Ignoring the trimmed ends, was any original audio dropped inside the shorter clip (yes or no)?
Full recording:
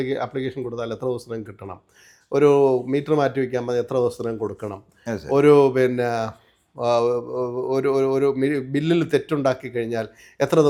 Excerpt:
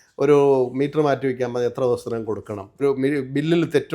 yes